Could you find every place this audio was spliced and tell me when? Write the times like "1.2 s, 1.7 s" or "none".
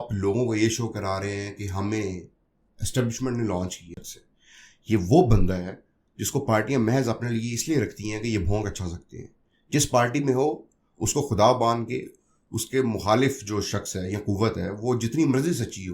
4.0 s